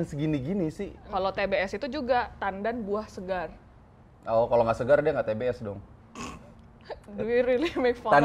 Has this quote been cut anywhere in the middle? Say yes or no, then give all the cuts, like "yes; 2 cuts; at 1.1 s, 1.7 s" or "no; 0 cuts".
yes; 1 cut; at 1.1 s